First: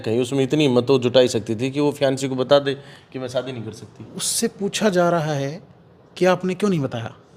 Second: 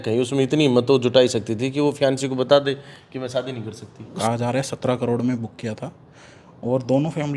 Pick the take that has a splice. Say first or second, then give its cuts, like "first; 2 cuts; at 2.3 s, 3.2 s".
second; 1 cut; at 4.1 s